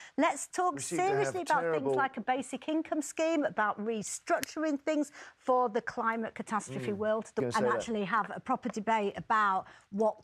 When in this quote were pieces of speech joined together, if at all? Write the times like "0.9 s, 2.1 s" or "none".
7.4 s